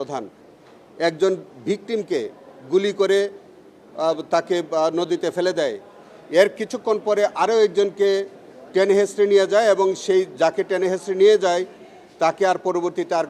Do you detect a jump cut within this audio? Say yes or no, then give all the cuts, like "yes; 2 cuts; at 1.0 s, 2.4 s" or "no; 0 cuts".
no; 0 cuts